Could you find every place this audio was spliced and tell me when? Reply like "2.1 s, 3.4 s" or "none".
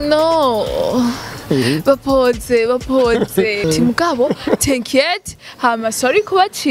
3.6 s